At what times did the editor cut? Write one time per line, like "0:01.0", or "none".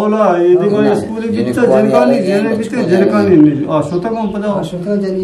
none